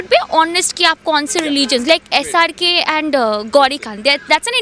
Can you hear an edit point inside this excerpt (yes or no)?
no